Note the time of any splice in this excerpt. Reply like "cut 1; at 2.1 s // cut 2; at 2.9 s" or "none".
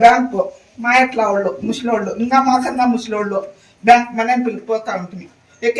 none